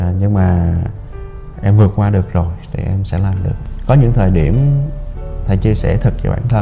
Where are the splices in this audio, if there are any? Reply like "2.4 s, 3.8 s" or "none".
3.7 s